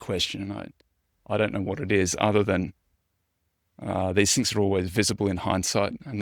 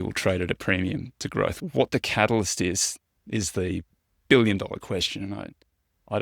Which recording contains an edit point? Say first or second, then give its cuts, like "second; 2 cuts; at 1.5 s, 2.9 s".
second; 1 cut; at 1.6 s